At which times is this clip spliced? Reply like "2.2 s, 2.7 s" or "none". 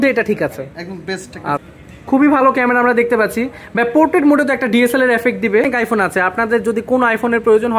1.6 s, 5.7 s